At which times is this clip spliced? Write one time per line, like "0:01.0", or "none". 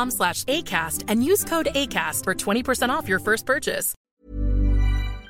0:03.9